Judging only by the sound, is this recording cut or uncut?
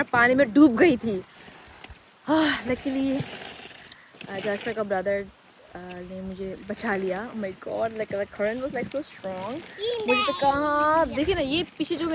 uncut